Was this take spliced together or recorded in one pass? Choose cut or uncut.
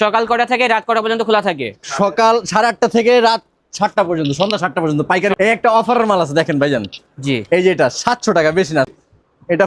cut